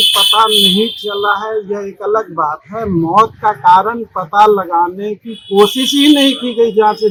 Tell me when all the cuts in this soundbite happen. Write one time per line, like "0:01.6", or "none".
none